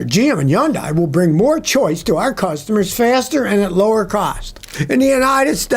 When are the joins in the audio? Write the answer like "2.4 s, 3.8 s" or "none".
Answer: 4.7 s